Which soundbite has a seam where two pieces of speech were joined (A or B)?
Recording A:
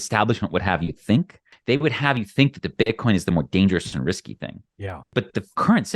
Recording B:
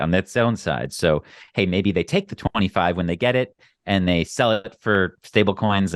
A